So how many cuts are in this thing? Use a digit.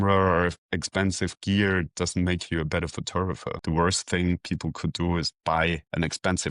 1